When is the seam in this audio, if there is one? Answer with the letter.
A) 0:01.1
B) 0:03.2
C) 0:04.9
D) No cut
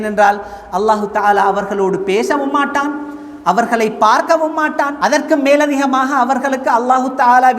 C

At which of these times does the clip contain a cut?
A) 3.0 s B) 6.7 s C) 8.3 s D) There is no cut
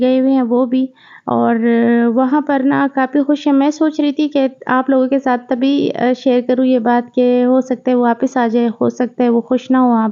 D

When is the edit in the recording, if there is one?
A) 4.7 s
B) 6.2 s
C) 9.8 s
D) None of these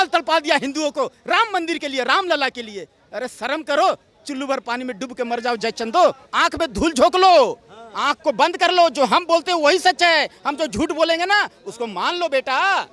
B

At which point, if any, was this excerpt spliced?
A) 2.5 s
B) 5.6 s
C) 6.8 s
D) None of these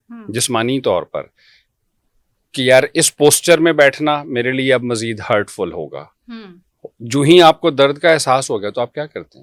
D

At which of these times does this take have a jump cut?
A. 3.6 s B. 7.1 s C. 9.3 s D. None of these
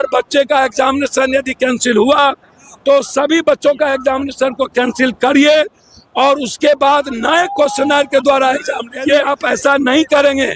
C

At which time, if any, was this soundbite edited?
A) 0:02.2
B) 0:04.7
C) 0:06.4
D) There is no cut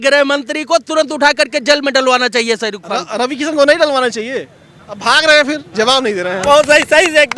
C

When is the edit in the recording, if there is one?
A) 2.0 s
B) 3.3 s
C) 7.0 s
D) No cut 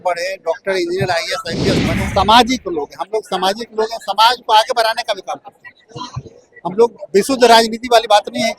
A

